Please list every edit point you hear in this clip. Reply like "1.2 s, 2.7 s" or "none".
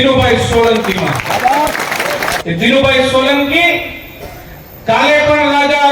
2.4 s